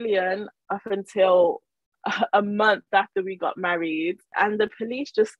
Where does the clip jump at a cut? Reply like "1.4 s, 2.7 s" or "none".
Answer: 4.3 s